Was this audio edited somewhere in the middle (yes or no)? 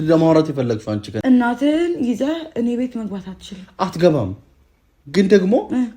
yes